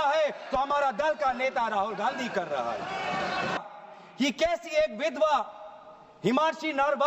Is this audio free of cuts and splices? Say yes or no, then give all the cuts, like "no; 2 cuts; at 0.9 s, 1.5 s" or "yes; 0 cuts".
no; 1 cut; at 3.6 s